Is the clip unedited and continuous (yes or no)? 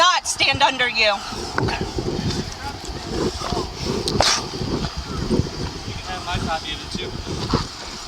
yes